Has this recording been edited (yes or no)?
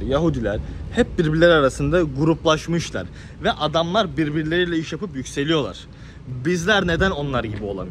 no